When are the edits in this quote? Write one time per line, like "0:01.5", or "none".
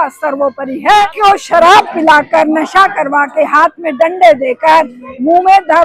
0:01.1